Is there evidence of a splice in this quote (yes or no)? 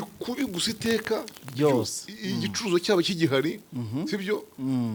no